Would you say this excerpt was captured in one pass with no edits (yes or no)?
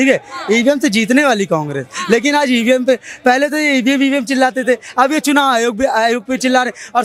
yes